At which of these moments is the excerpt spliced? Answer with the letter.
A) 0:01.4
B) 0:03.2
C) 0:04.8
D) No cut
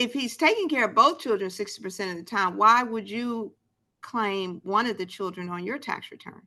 D